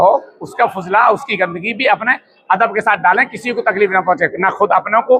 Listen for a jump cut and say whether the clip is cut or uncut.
uncut